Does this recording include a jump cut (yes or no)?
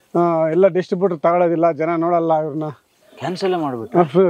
no